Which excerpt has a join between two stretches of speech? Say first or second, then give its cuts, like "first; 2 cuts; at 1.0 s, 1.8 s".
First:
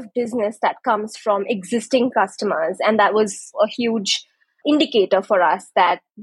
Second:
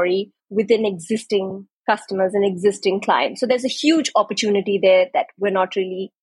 first; 2 cuts; at 3.6 s, 4.6 s